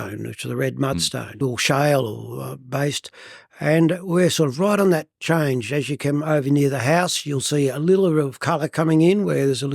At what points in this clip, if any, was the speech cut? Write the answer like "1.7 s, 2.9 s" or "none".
1.4 s